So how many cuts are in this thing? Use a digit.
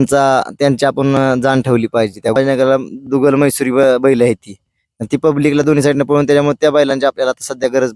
1